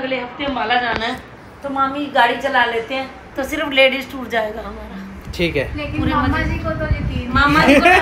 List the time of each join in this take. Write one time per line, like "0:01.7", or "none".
none